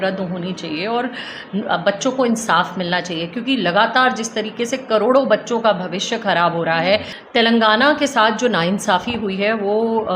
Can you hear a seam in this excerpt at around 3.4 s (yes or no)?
no